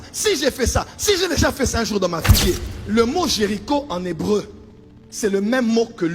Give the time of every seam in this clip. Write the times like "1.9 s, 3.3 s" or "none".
2.3 s

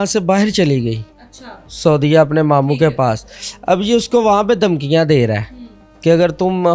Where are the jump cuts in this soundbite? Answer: none

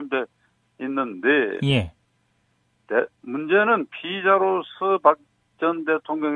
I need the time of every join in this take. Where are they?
3.7 s

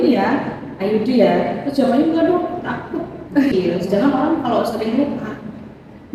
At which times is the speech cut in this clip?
3.5 s

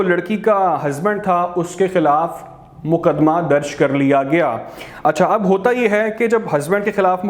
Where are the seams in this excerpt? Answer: none

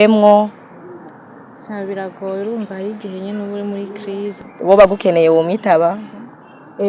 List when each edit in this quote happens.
4.5 s

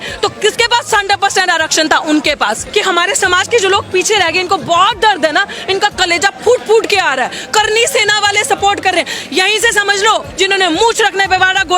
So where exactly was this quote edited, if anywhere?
2.6 s, 10.3 s

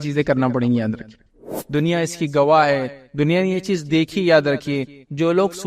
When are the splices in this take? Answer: 1.4 s

